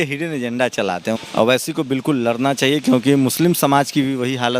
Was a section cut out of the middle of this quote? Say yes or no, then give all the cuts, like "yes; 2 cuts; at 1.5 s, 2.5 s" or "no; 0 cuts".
yes; 1 cut; at 1.2 s